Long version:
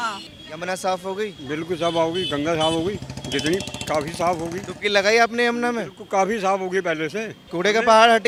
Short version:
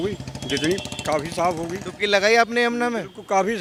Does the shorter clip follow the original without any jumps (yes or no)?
yes